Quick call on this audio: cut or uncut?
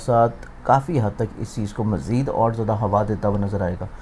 uncut